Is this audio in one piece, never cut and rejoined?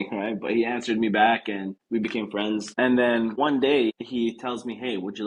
no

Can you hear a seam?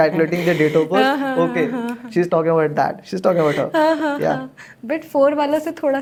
no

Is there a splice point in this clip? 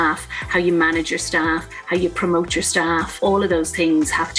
yes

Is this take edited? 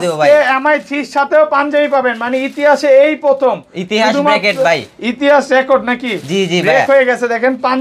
no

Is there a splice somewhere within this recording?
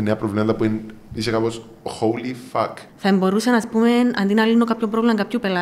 yes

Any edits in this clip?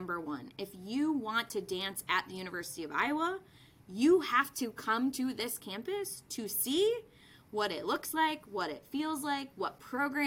no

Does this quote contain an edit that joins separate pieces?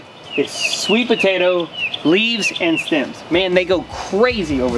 no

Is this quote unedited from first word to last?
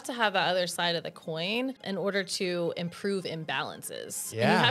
no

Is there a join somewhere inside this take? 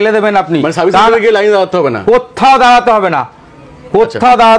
no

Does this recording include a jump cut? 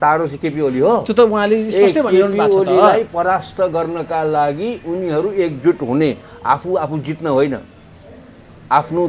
no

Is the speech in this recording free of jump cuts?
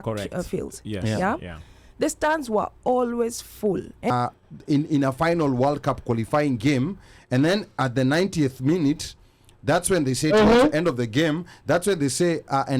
no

